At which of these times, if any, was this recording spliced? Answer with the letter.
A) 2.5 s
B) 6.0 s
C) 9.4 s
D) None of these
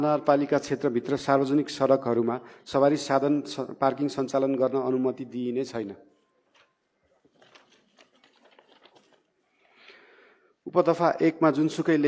D